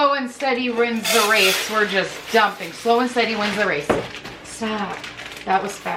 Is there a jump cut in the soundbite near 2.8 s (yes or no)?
no